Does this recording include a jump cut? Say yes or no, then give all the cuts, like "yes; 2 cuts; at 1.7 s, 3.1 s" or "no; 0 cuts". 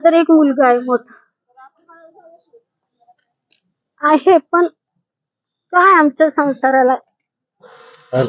no; 0 cuts